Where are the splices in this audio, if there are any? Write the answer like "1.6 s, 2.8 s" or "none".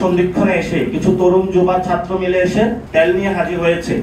2.8 s

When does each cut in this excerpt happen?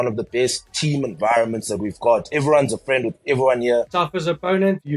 3.9 s

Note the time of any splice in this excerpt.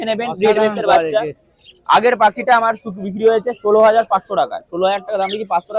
none

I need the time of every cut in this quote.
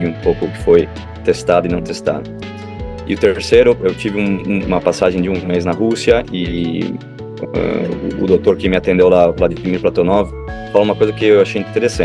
none

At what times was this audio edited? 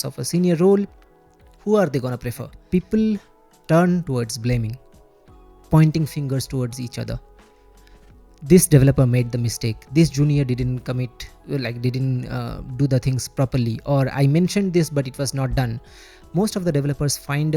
2.6 s

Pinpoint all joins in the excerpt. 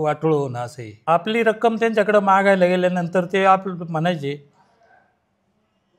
0.9 s

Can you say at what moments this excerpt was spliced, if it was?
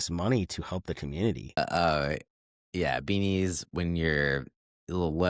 1.6 s

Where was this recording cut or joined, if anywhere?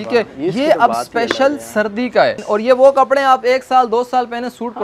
2.4 s

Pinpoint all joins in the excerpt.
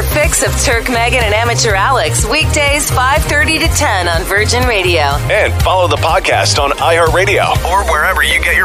none

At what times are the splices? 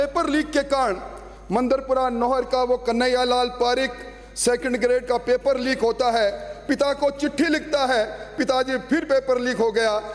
none

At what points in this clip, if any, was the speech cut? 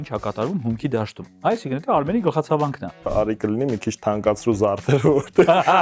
1.2 s, 3.1 s

